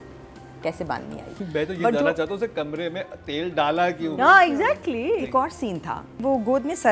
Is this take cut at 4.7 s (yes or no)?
no